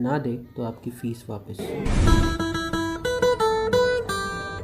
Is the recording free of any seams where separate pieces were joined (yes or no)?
yes